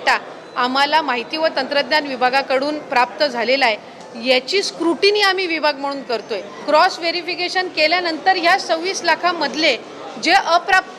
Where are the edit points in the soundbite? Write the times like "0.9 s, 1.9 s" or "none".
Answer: 6.5 s